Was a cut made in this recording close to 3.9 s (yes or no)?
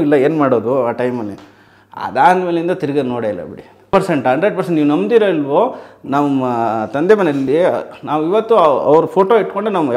yes